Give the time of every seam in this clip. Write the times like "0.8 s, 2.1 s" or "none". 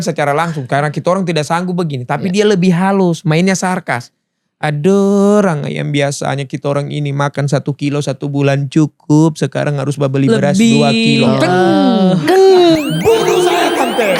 none